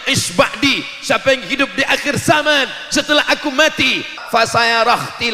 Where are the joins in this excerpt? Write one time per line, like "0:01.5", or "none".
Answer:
0:04.2